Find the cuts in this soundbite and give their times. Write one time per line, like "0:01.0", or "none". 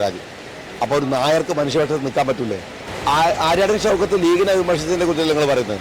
0:02.8